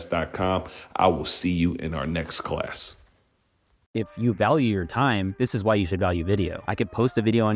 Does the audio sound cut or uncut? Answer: cut